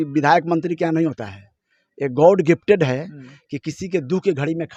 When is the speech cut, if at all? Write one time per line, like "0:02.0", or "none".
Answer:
none